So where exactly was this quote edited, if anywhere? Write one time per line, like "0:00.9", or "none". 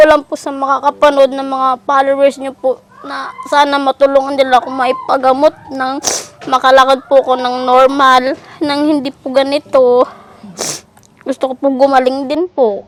none

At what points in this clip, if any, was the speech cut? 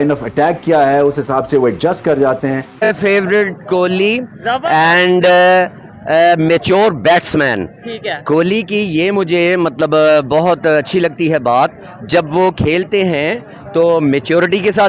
0:02.9

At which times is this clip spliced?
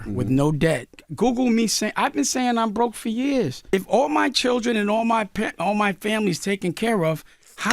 0:01.0
0:03.6

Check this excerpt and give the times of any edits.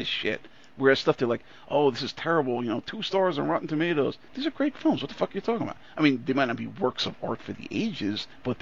0:04.3

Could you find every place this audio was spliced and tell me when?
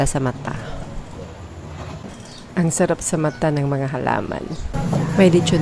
0:02.0
0:04.7

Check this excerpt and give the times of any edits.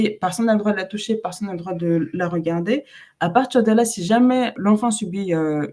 0:04.5

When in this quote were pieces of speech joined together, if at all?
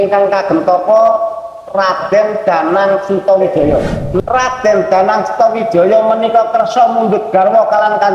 0:04.2

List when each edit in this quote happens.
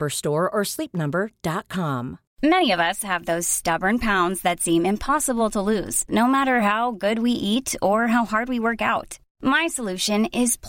0:02.2

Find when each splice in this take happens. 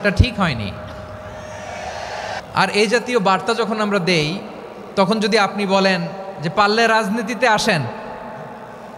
0:02.4

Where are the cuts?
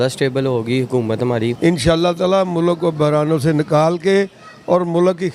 0:01.6

